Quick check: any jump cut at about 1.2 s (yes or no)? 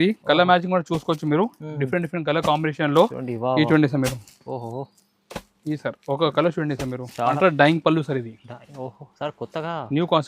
no